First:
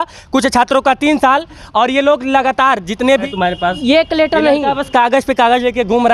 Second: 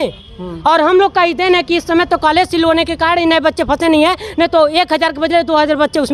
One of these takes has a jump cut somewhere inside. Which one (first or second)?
first